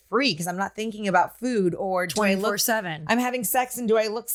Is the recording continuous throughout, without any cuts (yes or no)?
yes